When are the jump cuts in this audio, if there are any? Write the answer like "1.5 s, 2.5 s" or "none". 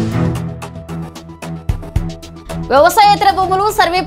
2.7 s